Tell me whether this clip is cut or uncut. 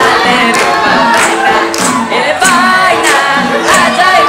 uncut